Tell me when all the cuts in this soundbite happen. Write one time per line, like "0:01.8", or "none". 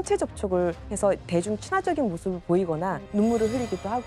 0:03.0